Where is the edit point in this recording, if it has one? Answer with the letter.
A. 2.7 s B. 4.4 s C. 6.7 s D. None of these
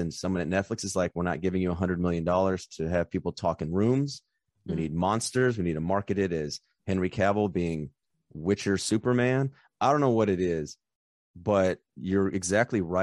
D